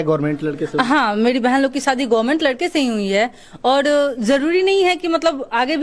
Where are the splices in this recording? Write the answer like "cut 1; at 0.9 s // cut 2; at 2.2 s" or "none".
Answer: none